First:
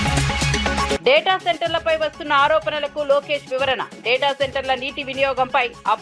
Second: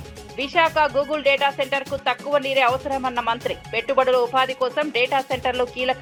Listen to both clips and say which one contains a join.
first; 1 cut; at 0.9 s

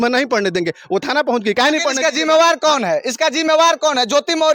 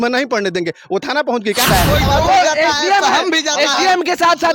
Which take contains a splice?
second; 1 cut; at 1.6 s

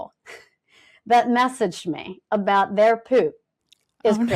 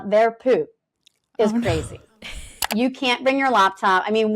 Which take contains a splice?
second; 1 cut; at 2.7 s

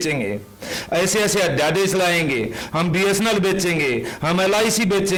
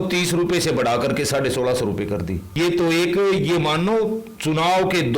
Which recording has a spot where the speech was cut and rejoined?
second; 1 cut; at 2.5 s

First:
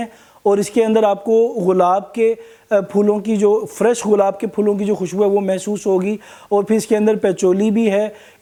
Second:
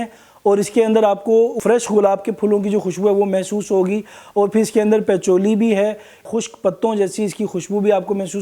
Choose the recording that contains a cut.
second; 2 cuts; at 1.6 s, 6.3 s

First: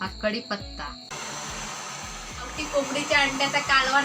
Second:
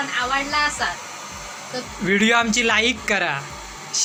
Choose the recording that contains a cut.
first; 1 cut; at 1.1 s

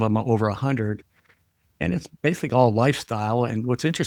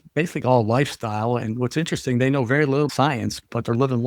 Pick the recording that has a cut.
second; 1 cut; at 2.9 s

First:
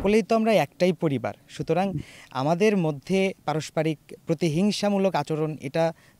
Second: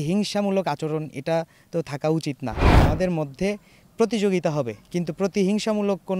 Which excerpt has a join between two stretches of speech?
second; 1 cut; at 2.7 s

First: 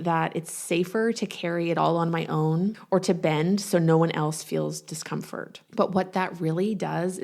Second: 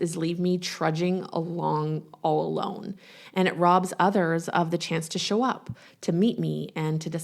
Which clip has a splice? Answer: first; 2 cuts; at 2.8 s, 5.6 s

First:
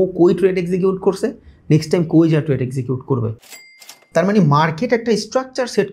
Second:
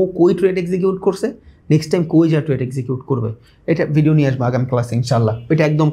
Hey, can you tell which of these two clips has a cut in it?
first; 1 cut; at 3.6 s

